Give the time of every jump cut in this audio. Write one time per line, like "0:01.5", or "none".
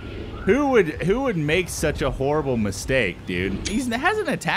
0:03.7